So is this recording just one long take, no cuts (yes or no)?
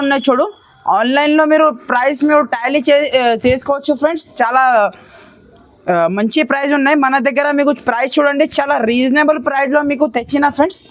yes